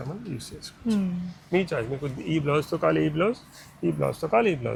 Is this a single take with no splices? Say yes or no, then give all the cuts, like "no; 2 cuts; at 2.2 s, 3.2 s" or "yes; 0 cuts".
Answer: yes; 0 cuts